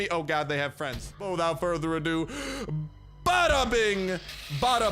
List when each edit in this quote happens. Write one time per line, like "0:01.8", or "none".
0:01.2